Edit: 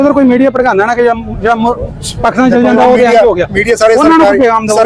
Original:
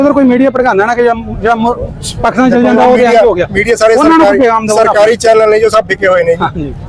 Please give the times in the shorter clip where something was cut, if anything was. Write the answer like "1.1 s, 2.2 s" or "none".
none